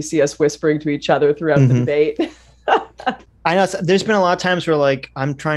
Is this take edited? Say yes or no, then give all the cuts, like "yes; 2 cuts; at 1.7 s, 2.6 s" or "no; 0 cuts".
no; 0 cuts